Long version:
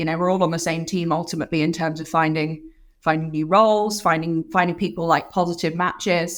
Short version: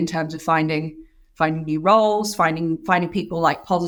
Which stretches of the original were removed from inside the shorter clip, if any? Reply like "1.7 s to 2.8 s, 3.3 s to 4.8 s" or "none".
none